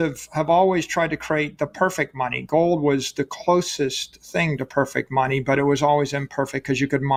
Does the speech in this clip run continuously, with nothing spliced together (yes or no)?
yes